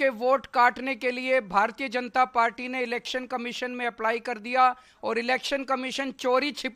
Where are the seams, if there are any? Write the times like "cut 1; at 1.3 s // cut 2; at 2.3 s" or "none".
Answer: none